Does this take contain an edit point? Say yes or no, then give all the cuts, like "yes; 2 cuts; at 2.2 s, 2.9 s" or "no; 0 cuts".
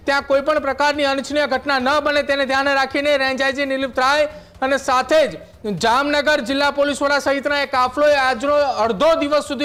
no; 0 cuts